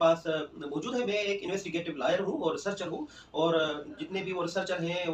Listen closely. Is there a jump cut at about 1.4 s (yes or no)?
no